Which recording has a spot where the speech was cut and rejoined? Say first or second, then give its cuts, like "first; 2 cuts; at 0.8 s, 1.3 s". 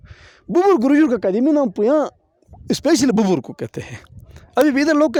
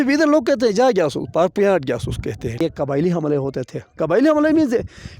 second; 1 cut; at 2.6 s